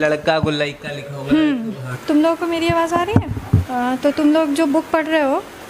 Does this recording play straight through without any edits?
no; 2 cuts; at 1.9 s, 3.7 s

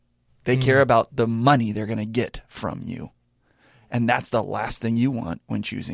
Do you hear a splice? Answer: no; 0 cuts

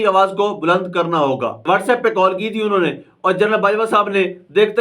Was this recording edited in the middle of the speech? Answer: yes; 1 cut; at 1.5 s

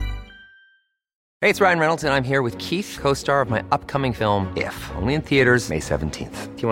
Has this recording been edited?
yes; 1 cut; at 1.2 s

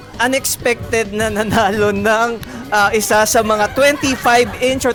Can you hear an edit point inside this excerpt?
no; 0 cuts

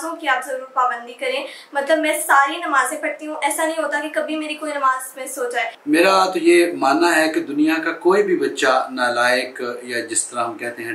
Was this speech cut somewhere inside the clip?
yes; 1 cut; at 5.8 s

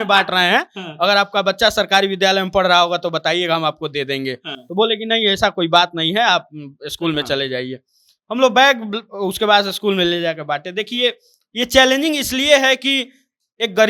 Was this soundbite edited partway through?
no; 0 cuts

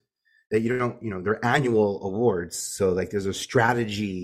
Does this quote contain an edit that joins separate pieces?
no; 0 cuts

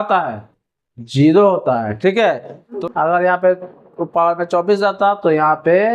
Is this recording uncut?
no; 1 cut; at 2.7 s

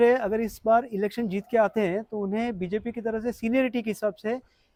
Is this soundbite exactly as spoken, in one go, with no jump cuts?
yes; 0 cuts

